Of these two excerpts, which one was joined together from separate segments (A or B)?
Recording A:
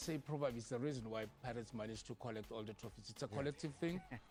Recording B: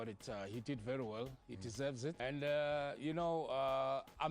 B